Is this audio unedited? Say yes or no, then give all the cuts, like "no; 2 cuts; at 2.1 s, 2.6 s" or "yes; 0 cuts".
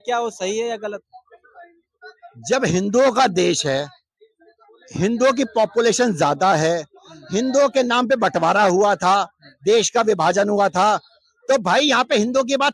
yes; 0 cuts